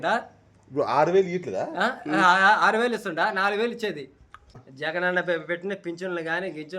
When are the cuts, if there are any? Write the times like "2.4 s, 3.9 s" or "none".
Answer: 4.7 s

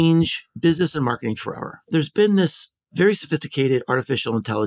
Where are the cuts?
1.8 s

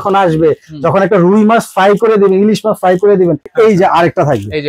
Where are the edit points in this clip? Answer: 3.5 s

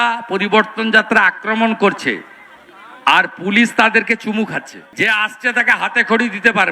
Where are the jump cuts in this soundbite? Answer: 4.8 s

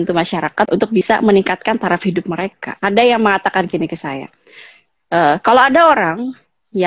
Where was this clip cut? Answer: 0.9 s, 2.6 s

